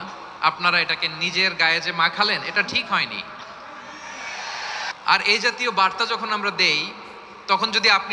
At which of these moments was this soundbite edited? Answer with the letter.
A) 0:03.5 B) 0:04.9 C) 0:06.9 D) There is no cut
B